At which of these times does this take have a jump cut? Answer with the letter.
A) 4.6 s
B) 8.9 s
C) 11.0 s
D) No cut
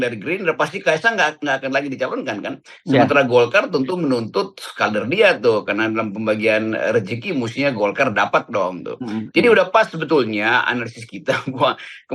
D